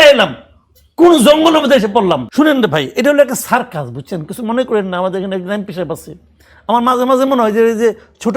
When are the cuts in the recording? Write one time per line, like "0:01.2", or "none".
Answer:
0:02.3